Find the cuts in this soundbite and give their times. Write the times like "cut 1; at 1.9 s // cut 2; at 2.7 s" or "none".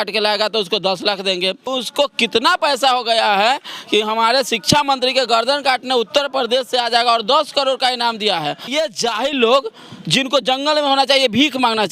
cut 1; at 1.7 s // cut 2; at 8.7 s

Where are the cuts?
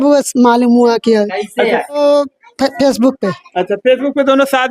cut 1; at 2.0 s

